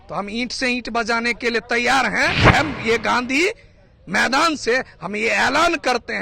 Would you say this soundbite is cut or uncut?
cut